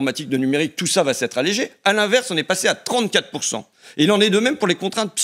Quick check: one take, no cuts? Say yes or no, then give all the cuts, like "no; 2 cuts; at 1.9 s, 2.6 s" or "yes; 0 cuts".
yes; 0 cuts